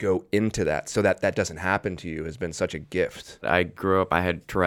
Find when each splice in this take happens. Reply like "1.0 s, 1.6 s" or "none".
3.4 s